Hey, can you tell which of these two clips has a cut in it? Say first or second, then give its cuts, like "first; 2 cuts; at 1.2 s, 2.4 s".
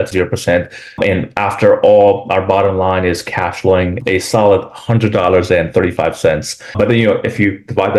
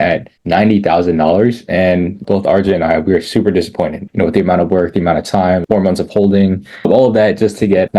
second; 2 cuts; at 2.2 s, 5.6 s